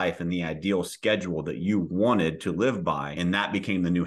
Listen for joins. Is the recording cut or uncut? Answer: cut